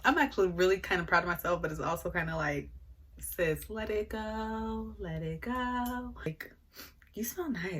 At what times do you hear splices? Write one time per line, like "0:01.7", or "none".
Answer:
0:06.4